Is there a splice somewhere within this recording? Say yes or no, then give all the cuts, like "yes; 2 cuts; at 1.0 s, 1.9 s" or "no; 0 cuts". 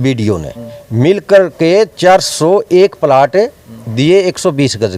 no; 0 cuts